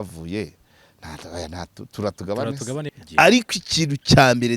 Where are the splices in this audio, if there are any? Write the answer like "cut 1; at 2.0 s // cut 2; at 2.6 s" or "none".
cut 1; at 3.0 s